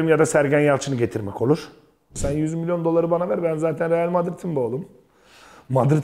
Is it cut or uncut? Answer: cut